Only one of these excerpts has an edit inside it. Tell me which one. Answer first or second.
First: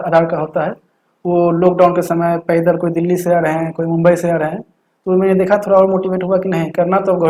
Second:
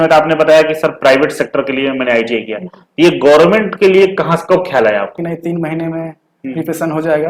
second